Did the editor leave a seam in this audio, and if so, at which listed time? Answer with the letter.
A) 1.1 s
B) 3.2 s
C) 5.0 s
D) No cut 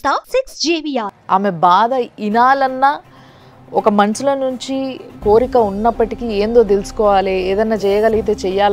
A